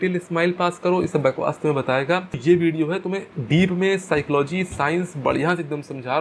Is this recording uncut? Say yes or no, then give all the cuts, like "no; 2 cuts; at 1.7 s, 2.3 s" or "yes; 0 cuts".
no; 1 cut; at 2.3 s